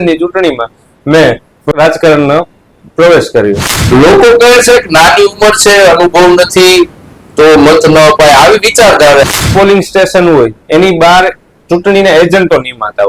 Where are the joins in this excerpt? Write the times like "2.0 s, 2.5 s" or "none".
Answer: 1.7 s, 3.7 s, 9.3 s